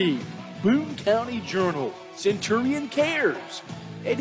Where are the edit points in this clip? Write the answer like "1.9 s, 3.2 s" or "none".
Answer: none